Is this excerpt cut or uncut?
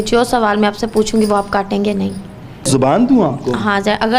cut